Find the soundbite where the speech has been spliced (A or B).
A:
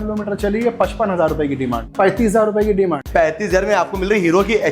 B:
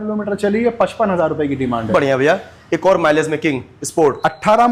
A